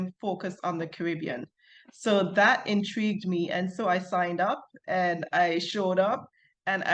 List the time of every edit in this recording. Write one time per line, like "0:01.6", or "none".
none